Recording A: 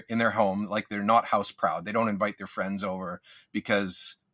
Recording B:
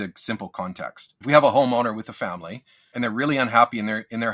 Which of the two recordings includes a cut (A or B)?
B